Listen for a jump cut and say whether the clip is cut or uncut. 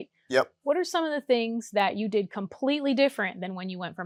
uncut